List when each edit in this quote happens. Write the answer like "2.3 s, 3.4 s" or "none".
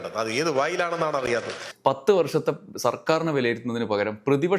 1.7 s